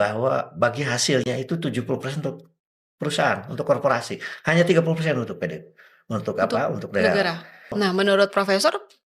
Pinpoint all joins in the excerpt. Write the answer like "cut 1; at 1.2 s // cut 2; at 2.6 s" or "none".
cut 1; at 7.7 s